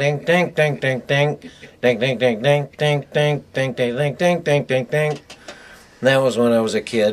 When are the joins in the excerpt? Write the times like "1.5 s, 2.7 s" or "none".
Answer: 0.9 s